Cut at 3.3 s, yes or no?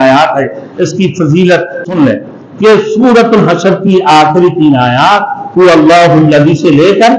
no